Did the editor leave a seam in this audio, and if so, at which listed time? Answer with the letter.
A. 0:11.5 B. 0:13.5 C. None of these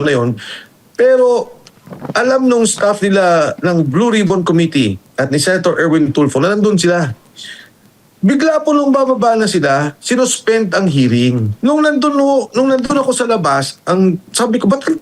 A